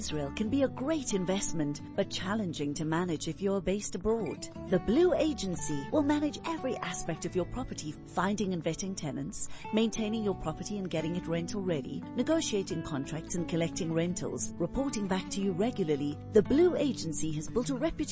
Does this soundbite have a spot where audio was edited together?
no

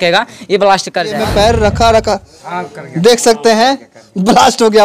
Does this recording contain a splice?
yes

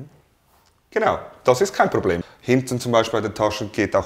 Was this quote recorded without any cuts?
no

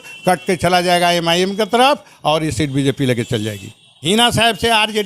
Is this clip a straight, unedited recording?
no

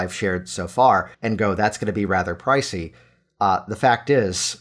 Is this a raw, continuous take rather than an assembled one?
no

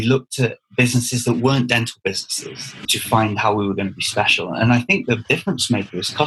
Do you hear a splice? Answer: no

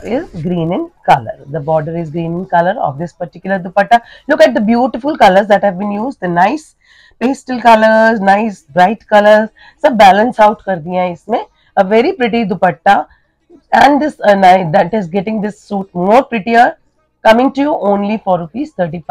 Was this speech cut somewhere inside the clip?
no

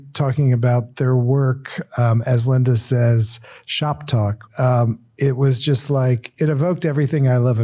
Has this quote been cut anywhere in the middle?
yes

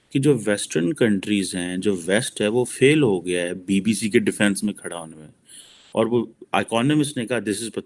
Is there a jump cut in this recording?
no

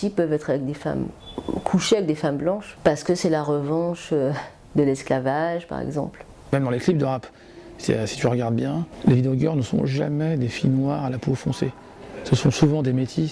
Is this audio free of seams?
no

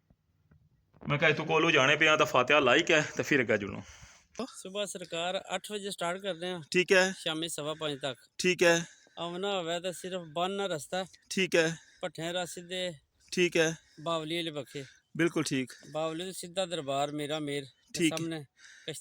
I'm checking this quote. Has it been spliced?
yes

